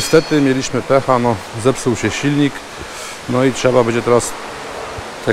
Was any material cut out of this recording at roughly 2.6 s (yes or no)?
no